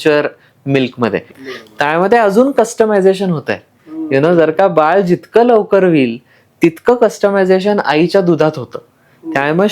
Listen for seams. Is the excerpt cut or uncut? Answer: cut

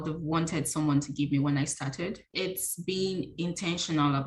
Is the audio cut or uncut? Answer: cut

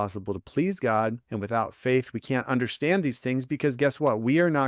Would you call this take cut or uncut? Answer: cut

